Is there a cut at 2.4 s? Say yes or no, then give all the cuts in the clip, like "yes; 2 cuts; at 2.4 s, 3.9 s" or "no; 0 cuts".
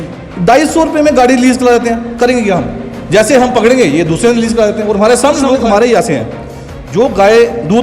no; 1 cut; at 5.5 s